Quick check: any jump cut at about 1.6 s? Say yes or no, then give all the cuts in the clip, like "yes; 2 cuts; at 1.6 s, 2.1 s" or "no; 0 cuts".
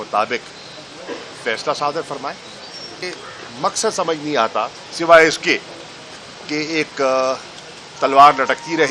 no; 1 cut; at 3.0 s